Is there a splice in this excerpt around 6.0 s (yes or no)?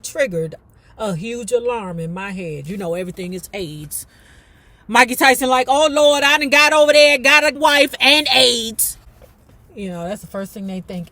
no